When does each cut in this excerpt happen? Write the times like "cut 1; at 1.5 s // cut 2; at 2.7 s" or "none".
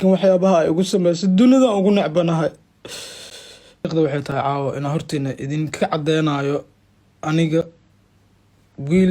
cut 1; at 3.8 s